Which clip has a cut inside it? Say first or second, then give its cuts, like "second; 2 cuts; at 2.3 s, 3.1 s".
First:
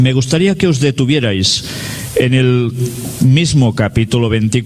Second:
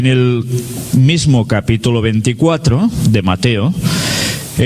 first; 1 cut; at 1.1 s